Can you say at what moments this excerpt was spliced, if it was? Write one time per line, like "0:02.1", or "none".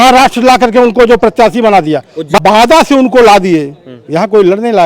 0:02.3